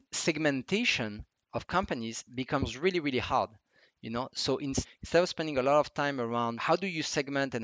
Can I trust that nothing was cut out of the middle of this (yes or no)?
no